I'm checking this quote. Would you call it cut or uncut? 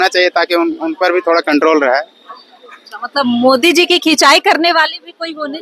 uncut